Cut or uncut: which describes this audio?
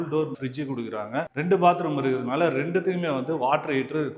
uncut